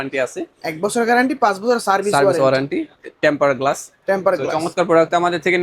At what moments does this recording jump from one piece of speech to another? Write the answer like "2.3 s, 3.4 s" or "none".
none